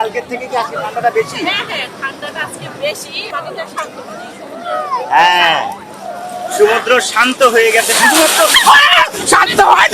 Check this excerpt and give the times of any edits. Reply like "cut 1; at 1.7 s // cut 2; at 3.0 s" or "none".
cut 1; at 3.3 s